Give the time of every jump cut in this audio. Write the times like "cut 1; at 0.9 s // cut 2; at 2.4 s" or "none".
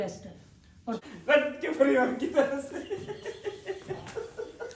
cut 1; at 1.0 s